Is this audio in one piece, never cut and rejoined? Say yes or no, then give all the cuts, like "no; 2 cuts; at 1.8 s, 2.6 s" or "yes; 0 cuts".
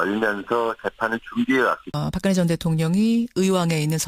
yes; 0 cuts